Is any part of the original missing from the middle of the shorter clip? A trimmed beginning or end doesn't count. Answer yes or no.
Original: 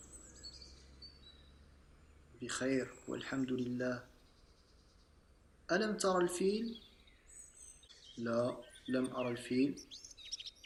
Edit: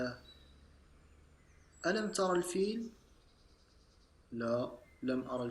no